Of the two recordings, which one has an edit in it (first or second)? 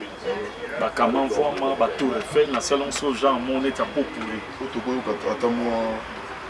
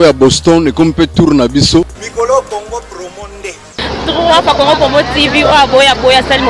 second